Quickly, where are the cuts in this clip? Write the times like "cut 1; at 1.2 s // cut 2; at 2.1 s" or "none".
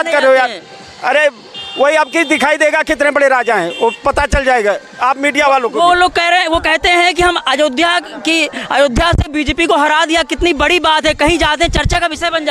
none

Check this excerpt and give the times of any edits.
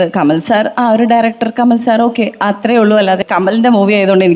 cut 1; at 3.2 s

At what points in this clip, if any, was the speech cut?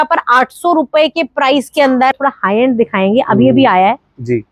cut 1; at 2.1 s

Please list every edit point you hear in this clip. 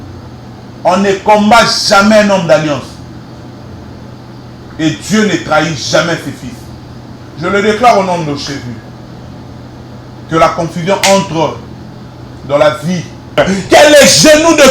cut 1; at 13.4 s

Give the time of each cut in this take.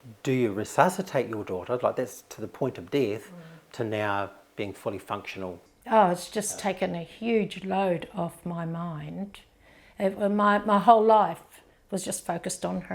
cut 1; at 5.7 s

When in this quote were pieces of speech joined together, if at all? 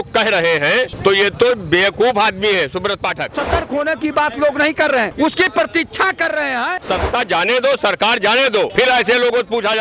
cut 1; at 3.4 s // cut 2; at 6.8 s

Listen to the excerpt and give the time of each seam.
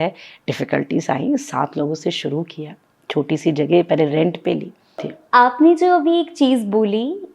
cut 1; at 5.1 s

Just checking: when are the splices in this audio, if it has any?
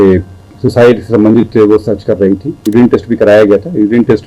cut 1; at 2.5 s

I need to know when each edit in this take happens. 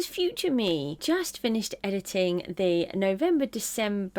cut 1; at 1.0 s

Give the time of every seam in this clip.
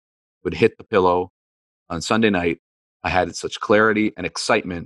none

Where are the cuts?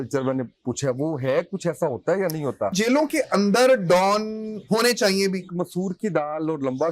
cut 1; at 2.7 s // cut 2; at 4.5 s // cut 3; at 5.5 s

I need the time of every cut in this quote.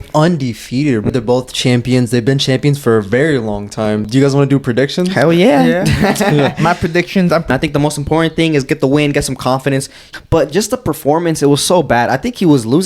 cut 1; at 1.1 s // cut 2; at 4.1 s // cut 3; at 7.5 s // cut 4; at 10.0 s

